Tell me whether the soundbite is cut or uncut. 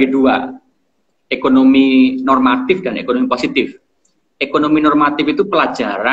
uncut